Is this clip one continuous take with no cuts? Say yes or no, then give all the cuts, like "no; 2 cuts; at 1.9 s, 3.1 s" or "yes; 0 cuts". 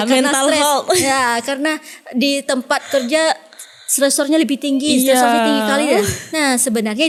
yes; 0 cuts